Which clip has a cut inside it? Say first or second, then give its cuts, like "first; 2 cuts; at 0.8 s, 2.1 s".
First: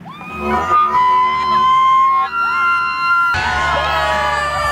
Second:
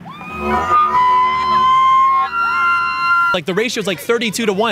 second; 1 cut; at 3.3 s